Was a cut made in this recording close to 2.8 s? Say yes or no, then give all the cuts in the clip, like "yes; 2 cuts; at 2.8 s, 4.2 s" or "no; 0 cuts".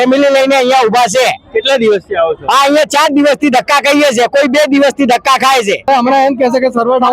no; 1 cut; at 5.9 s